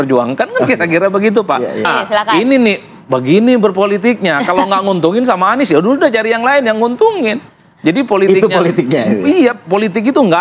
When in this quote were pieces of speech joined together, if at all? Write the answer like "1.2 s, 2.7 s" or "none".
1.9 s